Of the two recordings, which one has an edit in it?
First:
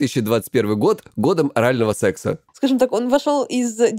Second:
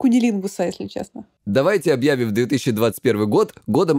first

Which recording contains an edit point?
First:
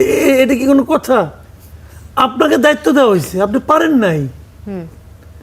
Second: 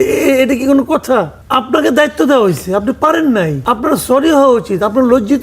second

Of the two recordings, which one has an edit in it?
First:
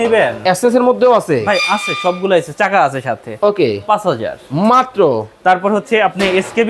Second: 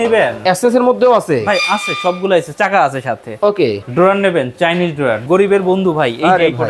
second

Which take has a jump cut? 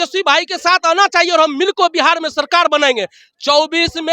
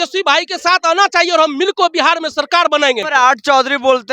second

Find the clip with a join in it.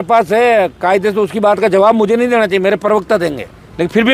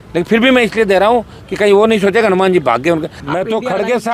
second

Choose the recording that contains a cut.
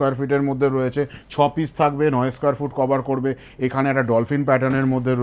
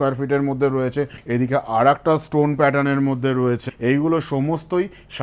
second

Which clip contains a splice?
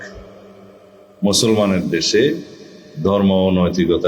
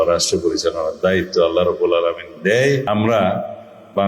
second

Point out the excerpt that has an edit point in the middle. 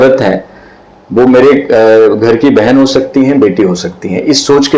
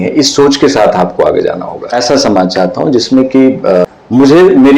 second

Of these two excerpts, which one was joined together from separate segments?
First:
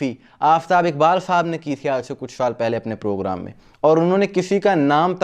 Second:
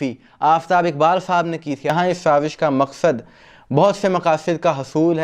second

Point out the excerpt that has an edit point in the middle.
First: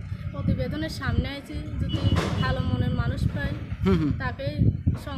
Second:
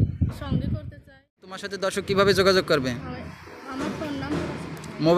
second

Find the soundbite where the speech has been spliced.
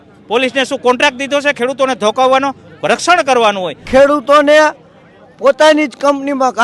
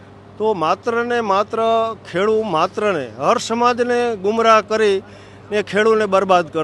first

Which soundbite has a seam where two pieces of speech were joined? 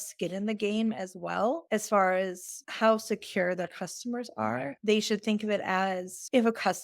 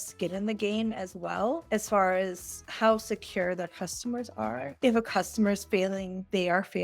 second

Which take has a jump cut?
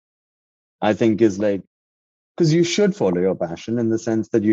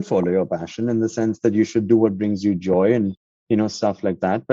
first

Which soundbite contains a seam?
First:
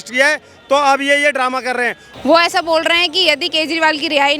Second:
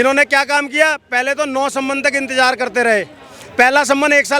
first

